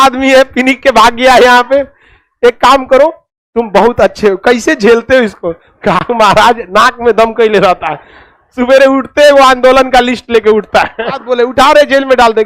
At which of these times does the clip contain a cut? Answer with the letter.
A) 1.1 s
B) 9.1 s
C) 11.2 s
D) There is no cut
C